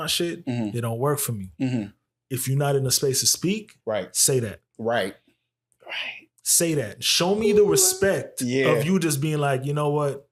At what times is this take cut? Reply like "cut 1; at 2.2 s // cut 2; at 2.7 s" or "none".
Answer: none